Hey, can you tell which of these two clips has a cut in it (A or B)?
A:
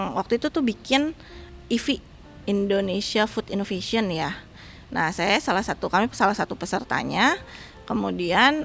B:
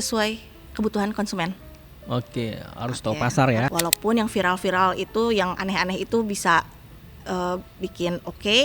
B